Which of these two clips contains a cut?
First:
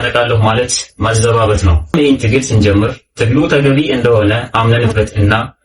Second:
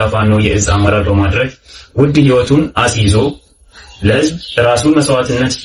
first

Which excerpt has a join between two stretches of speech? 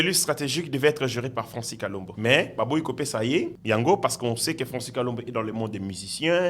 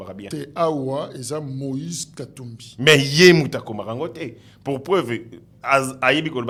first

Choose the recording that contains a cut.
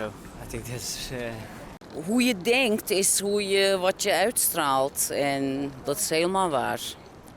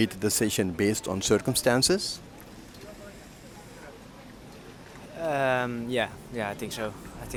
first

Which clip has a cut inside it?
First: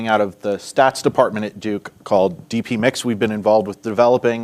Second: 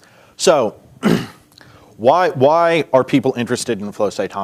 first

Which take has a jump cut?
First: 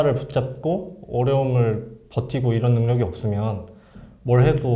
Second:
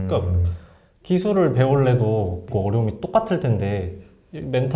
second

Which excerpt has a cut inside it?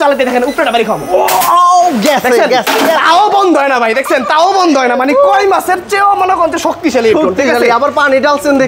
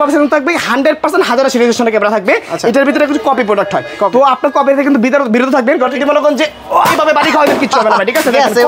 second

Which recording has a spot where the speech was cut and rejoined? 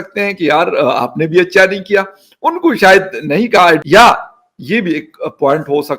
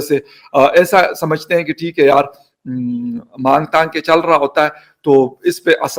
first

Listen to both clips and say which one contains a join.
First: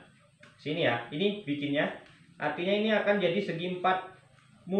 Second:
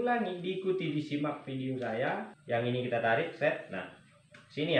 second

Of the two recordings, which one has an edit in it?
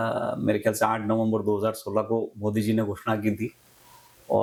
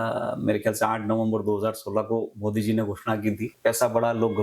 second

